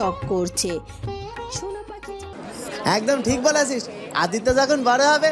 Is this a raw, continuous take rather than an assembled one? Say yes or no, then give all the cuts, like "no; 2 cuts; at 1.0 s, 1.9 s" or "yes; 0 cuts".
no; 1 cut; at 2.3 s